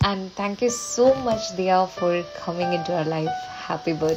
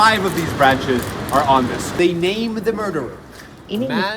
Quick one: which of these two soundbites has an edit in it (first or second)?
second